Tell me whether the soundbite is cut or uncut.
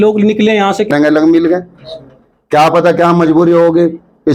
cut